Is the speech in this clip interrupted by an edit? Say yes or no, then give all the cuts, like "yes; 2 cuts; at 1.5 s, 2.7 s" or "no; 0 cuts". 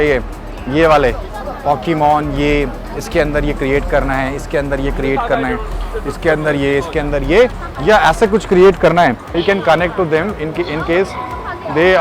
no; 0 cuts